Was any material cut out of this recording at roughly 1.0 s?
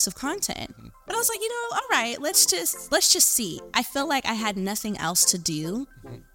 yes; 1 cut; at 1.0 s

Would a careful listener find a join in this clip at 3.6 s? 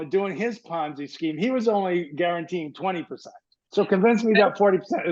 yes; 1 cut; at 3.6 s

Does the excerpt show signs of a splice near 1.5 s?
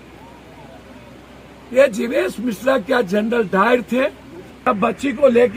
no; 1 cut; at 4.7 s

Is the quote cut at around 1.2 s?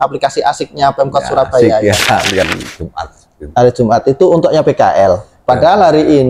no; 1 cut; at 2.5 s

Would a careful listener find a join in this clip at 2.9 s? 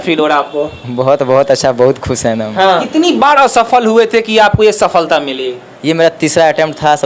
yes; 1 cut; at 2.9 s

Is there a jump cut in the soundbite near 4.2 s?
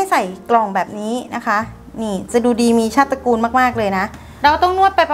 yes; 1 cut; at 4.2 s

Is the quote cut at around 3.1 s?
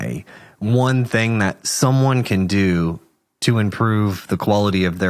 no; 1 cut; at 1.6 s

